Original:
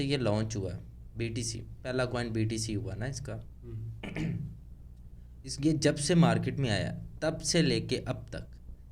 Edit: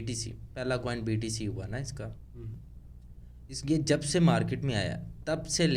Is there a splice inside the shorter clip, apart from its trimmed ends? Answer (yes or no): yes